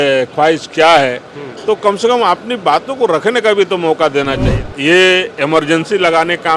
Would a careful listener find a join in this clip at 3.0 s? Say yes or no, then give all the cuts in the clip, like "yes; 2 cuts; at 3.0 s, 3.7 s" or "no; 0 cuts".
no; 1 cut; at 4.6 s